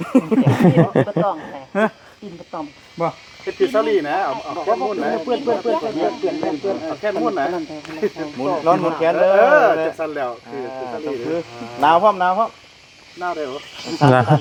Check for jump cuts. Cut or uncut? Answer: uncut